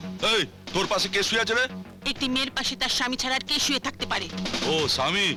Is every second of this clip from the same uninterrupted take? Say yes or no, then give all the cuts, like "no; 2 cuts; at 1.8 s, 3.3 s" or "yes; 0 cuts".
yes; 0 cuts